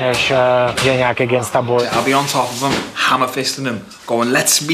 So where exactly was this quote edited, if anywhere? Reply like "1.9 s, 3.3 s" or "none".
1.8 s